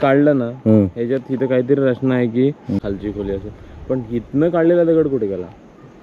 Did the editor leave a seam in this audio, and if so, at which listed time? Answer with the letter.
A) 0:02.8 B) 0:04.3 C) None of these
A